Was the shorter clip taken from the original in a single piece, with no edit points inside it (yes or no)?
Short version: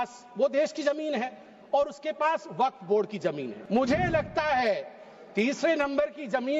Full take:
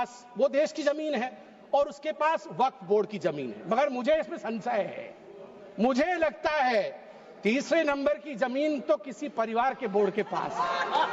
no